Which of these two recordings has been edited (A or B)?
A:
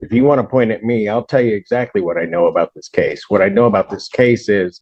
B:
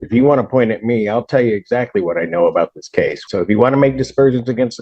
B